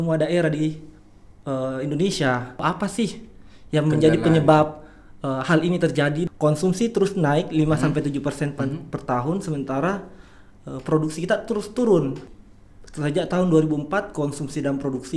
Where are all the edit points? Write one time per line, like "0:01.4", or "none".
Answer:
0:02.6
0:06.2
0:12.3